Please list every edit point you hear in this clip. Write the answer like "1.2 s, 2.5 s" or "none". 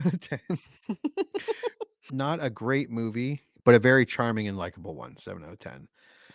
1.9 s